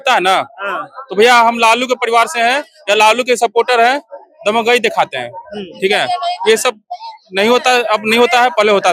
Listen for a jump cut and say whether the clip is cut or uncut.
uncut